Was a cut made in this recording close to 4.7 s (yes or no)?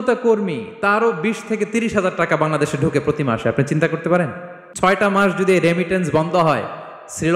yes